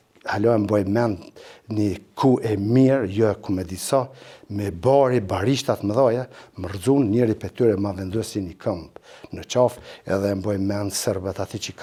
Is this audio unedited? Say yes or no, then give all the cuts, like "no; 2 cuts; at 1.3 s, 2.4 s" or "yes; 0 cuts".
yes; 0 cuts